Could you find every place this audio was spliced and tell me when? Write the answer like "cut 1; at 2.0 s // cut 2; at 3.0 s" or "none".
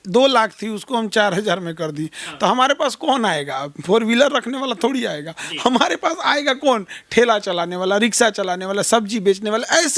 none